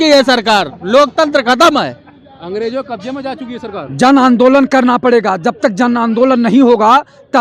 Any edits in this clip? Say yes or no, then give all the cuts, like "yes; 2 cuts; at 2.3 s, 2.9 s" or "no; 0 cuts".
no; 0 cuts